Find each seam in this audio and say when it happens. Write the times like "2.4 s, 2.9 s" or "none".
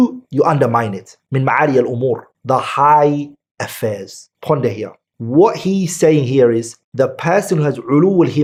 none

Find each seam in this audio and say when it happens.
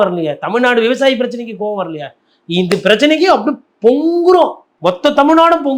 4.7 s

